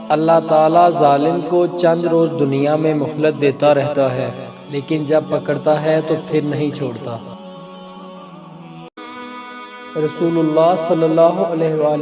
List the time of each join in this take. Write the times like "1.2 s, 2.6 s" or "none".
9.0 s